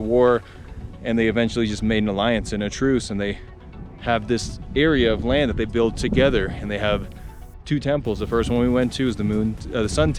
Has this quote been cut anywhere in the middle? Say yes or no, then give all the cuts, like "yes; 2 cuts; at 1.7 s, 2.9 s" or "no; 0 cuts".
no; 0 cuts